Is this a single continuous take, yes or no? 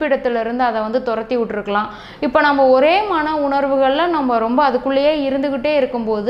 no